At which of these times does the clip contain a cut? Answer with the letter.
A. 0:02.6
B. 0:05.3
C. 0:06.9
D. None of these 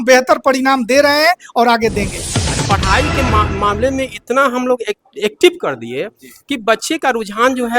A